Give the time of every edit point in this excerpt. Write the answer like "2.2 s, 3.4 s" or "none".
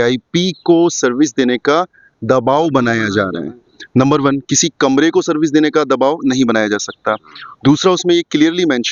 none